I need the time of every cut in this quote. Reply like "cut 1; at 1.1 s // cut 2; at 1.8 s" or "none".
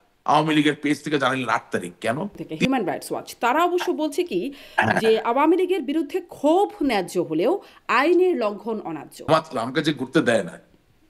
cut 1; at 2.4 s // cut 2; at 9.2 s